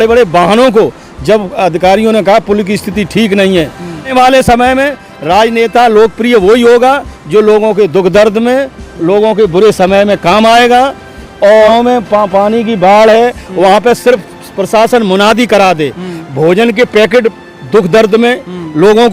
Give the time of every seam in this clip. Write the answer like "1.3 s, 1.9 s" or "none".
4.1 s, 11.7 s